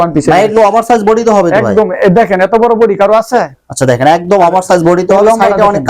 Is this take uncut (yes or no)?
yes